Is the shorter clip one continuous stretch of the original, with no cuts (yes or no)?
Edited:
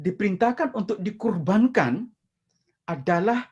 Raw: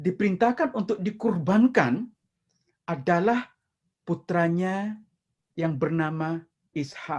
yes